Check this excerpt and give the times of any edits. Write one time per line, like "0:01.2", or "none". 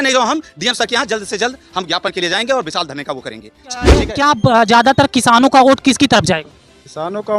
0:04.0